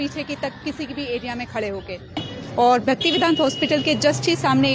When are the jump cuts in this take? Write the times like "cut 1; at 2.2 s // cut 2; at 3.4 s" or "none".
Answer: cut 1; at 2.5 s